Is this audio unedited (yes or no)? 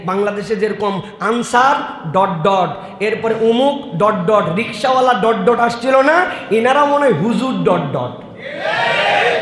yes